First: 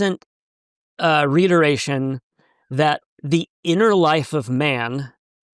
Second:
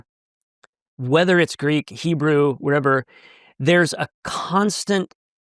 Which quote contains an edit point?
first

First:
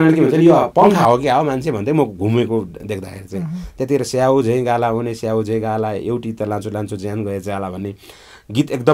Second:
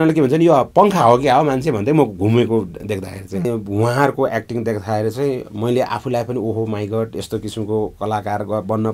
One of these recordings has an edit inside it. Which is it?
second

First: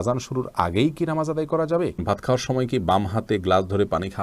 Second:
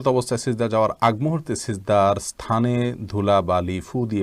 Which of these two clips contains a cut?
first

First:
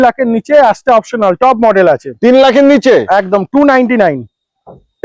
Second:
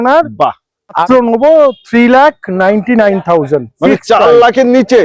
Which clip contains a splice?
second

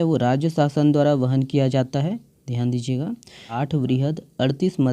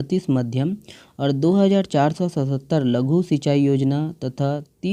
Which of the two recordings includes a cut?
first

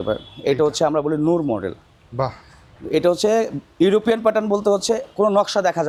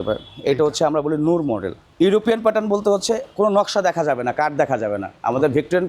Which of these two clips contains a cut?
second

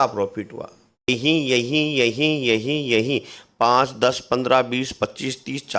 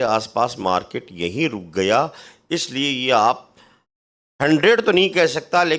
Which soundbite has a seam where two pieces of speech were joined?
first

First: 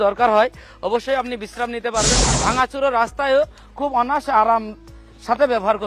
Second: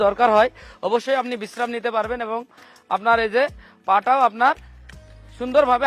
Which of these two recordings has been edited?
first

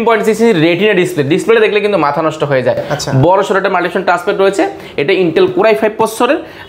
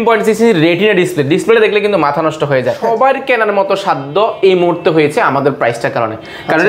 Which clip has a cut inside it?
second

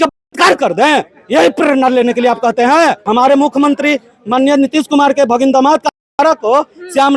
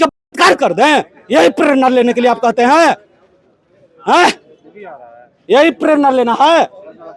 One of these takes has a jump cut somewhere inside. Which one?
first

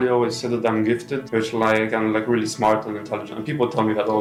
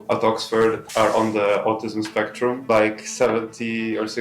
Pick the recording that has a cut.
second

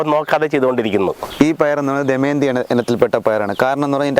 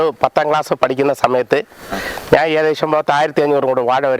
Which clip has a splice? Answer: first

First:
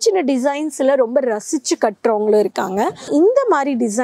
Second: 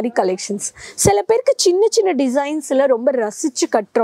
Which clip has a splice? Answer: first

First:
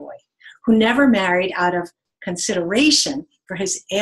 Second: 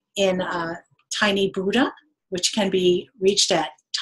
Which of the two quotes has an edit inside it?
second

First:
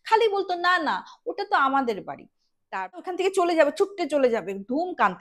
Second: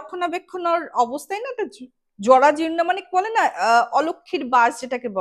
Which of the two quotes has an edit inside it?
first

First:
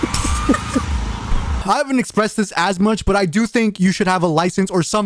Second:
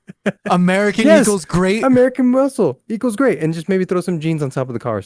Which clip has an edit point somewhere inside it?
first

